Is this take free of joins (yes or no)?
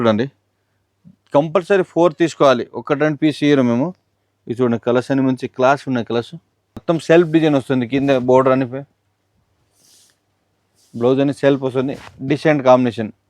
no